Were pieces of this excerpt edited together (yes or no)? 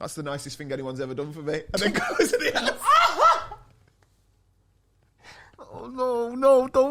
no